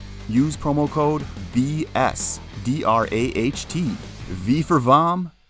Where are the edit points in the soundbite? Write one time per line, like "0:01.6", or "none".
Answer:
none